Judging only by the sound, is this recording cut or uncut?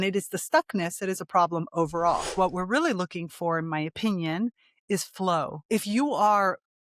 cut